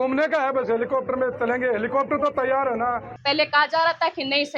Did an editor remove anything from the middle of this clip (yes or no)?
yes